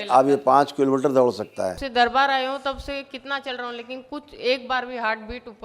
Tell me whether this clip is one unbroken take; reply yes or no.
no